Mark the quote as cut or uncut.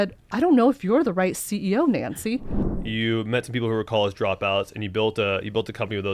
cut